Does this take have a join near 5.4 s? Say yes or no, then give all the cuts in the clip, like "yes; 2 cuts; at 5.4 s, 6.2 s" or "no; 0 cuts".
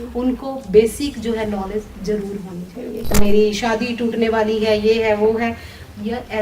no; 1 cut; at 3.1 s